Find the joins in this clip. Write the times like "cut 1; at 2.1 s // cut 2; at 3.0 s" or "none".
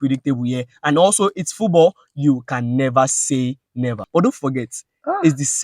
cut 1; at 4.0 s